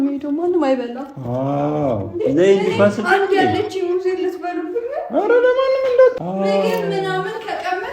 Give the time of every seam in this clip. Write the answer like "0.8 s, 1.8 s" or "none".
6.1 s